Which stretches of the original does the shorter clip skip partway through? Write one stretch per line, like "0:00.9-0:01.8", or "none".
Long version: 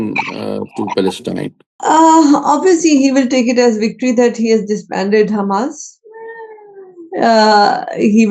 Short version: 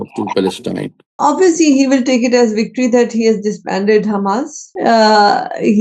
0:01.8-0:02.4
0:05.9-0:07.0